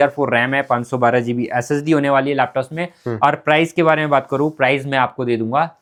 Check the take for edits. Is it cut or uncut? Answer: uncut